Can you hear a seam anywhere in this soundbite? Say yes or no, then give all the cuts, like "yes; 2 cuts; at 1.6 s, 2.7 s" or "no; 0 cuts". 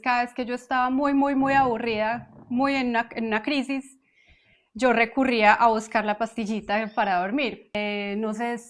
yes; 1 cut; at 7.7 s